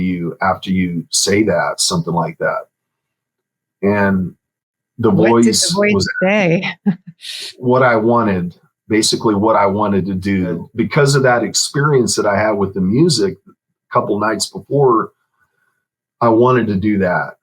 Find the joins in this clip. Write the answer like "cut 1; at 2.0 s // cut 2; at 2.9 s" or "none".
cut 1; at 7.5 s // cut 2; at 10.6 s